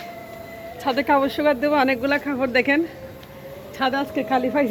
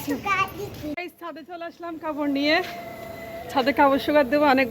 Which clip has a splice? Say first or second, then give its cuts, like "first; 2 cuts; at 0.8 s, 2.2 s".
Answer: second; 1 cut; at 1.0 s